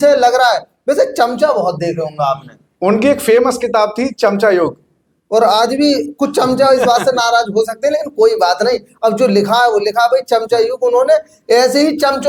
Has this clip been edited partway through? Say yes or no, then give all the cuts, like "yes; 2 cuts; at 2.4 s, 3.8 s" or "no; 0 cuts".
no; 0 cuts